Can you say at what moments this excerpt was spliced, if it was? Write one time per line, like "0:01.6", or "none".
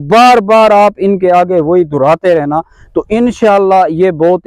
none